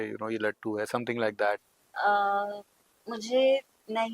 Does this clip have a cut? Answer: yes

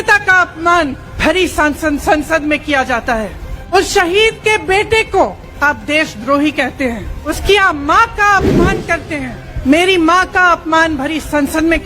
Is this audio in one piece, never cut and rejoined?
no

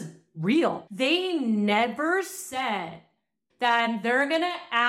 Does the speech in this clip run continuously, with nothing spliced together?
no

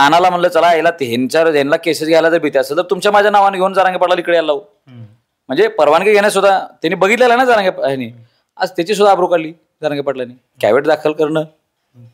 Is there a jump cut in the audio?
no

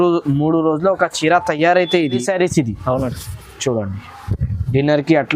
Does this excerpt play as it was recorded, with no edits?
no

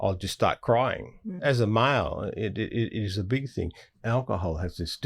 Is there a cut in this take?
yes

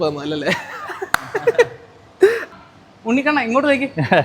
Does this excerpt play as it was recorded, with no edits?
no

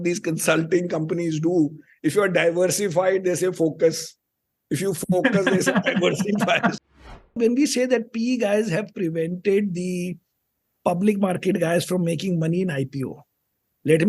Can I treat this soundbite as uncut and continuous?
no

